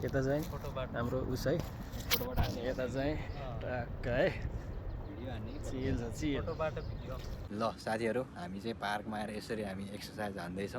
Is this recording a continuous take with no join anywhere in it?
no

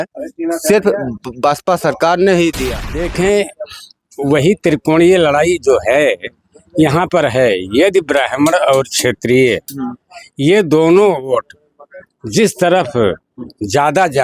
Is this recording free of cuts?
no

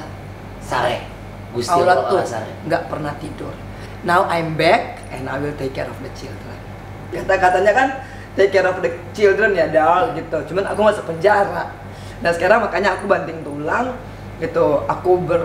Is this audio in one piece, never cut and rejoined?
no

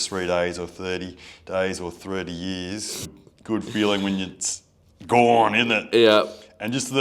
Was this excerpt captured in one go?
no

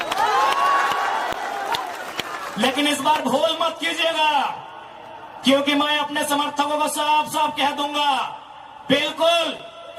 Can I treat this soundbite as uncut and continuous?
yes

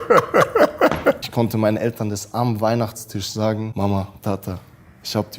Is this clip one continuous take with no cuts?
no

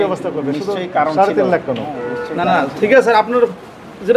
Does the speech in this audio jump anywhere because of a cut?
no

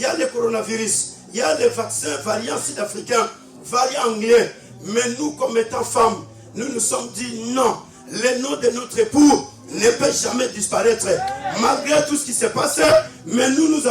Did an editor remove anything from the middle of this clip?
no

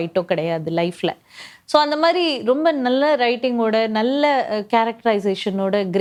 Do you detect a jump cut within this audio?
no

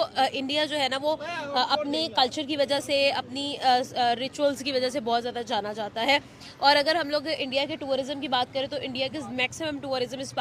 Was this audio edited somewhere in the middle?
no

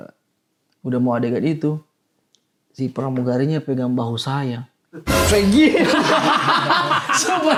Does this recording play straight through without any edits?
yes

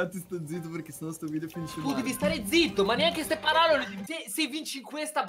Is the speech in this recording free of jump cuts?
no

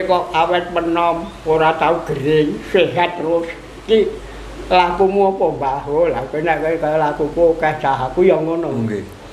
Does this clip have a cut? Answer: no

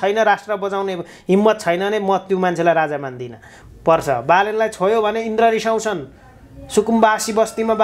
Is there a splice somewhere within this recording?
yes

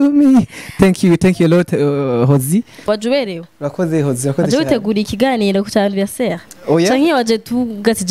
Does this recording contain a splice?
yes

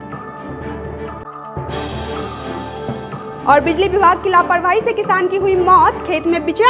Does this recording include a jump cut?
yes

